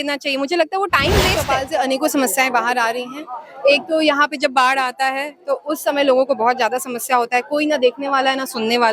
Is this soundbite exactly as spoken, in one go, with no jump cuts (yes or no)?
no